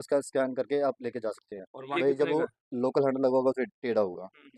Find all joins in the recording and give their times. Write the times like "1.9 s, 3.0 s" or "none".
1.8 s